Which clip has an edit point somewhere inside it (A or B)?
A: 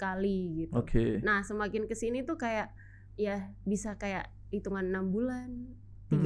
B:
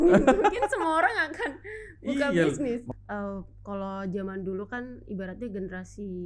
B